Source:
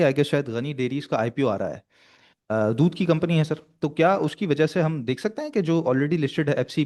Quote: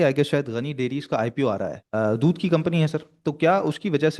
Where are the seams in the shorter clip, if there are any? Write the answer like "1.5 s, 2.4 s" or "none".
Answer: 1.8 s